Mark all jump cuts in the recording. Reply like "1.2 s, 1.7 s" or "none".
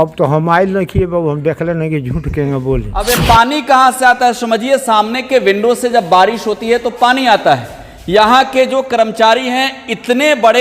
3.1 s